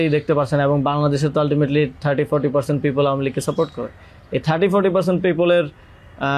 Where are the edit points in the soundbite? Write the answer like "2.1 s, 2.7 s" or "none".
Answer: none